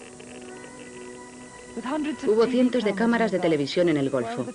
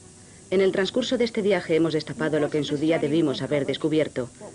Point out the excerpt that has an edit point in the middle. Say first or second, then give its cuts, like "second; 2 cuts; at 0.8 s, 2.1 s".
first; 1 cut; at 2.8 s